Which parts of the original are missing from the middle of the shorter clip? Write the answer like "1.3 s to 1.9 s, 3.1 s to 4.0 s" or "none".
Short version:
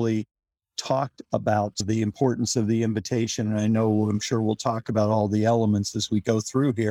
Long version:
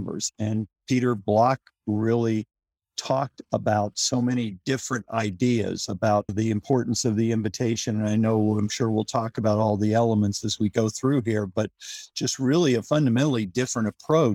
4.0 s to 6.3 s

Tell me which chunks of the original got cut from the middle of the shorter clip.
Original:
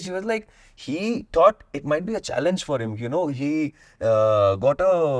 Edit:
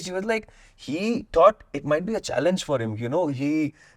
none

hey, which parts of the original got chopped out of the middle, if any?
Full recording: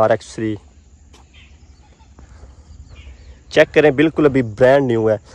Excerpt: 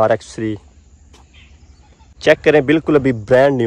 2.1 s to 3.4 s

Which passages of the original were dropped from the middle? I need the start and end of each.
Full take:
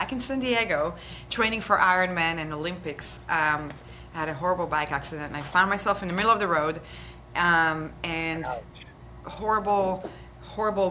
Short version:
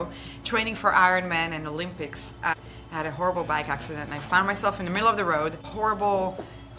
3.4 s to 3.8 s, 6.9 s to 9.3 s

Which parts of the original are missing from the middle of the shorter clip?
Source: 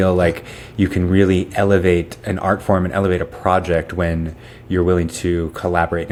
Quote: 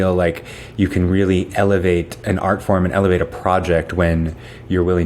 none

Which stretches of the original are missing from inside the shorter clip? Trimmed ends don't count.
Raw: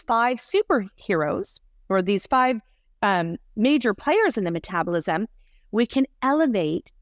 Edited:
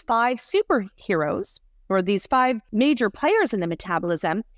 2.6 s to 3.5 s

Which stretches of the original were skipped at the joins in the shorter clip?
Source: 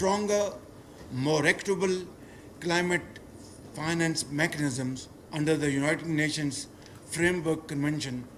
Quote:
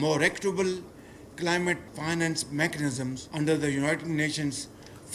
3.1 s to 3.7 s, 5.0 s to 5.2 s

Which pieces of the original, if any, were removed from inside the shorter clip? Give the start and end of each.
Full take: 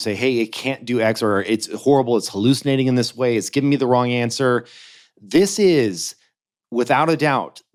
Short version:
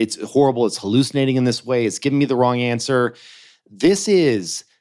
none

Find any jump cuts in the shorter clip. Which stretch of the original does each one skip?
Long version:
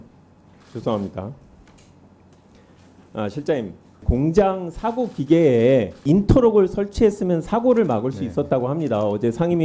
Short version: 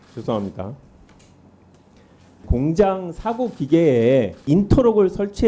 2.9 s to 3.9 s

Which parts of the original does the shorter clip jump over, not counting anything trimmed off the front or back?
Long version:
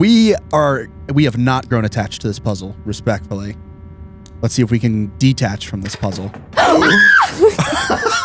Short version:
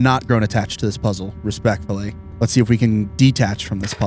3.6 s to 4.2 s

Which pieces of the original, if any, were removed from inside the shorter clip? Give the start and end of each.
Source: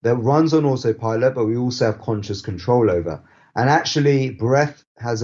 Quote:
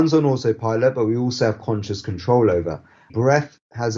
3.5 s to 4.3 s

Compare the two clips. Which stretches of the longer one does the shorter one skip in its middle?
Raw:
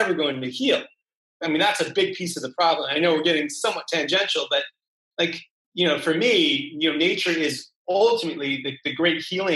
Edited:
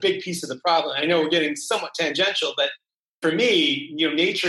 5.1 s to 6.0 s

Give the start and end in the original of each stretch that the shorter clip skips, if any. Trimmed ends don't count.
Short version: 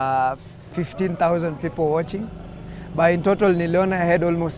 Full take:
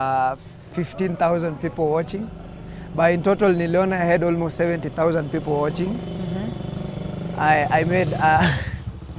none

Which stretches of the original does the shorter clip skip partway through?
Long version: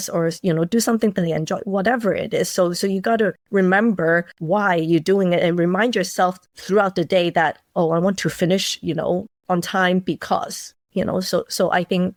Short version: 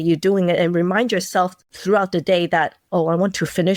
none

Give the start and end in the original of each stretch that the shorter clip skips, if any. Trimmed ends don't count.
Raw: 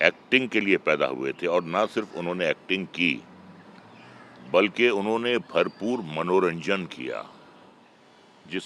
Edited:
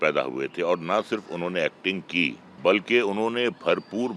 3.3 s to 4.3 s

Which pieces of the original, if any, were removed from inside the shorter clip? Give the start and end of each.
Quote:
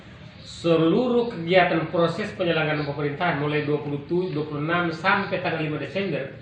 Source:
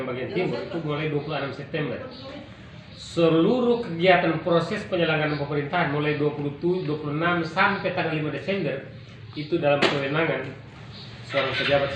none

